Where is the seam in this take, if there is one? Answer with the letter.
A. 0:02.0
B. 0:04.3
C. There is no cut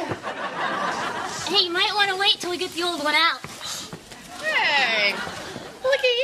C